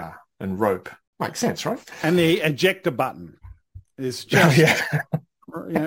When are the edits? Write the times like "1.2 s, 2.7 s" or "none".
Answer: 1.0 s